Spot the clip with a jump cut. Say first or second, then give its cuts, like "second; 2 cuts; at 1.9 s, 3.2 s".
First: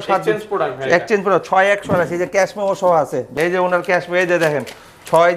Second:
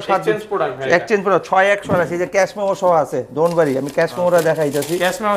first; 1 cut; at 3.3 s